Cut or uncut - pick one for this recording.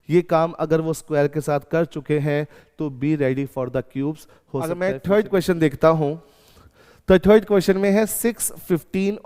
cut